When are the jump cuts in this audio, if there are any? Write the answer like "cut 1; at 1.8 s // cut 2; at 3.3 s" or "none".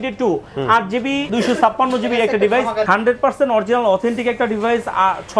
cut 1; at 1.3 s // cut 2; at 2.9 s